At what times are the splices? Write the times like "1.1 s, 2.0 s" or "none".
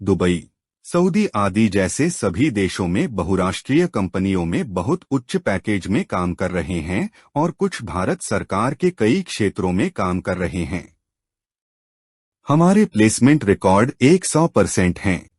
9.8 s